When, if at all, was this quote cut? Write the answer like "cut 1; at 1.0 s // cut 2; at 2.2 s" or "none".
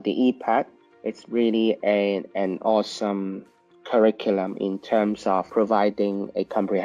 cut 1; at 5.5 s